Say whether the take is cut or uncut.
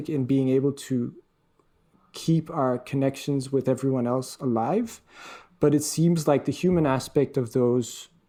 uncut